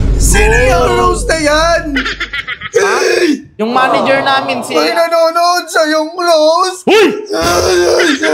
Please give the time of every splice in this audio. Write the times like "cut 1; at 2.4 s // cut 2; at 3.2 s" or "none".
cut 1; at 3.5 s